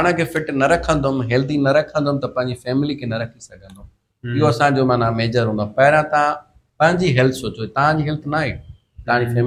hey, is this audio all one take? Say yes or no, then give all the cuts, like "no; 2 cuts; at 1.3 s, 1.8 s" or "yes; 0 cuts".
yes; 0 cuts